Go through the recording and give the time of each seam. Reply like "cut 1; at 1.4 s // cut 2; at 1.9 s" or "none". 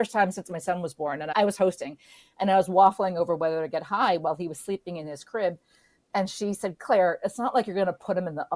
none